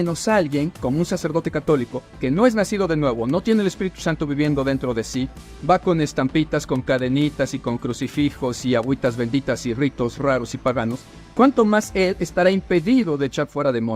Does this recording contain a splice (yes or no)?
yes